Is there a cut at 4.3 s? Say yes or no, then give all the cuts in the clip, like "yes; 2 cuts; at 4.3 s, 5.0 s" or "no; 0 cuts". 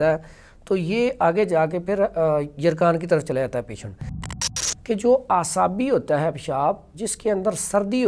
yes; 1 cut; at 4.3 s